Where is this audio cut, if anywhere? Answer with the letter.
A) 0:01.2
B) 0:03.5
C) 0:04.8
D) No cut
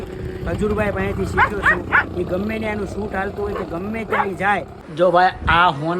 C